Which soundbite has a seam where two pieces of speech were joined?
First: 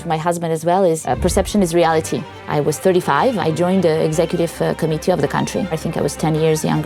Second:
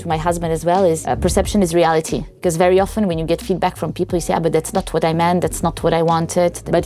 first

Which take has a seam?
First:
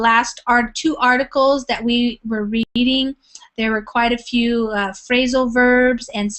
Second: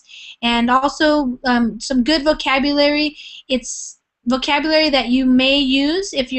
first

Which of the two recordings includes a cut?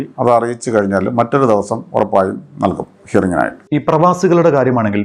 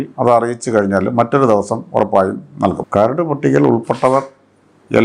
second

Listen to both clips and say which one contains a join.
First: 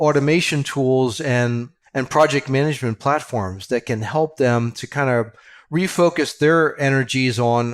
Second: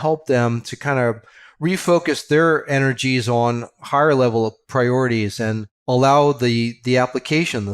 second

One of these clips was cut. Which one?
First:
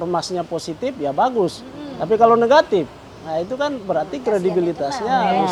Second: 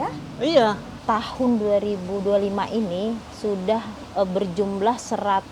second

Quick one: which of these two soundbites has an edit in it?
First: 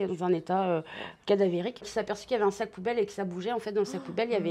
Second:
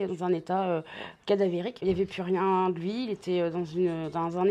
first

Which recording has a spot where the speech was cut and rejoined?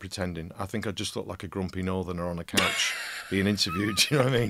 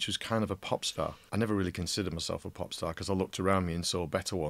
second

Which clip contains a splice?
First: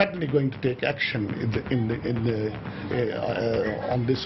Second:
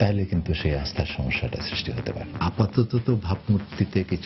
second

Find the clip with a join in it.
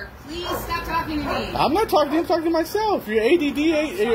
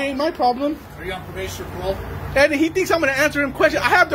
second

